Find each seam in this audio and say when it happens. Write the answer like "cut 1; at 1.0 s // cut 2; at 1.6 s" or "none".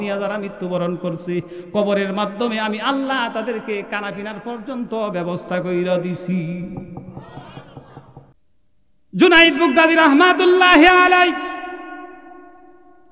cut 1; at 8.3 s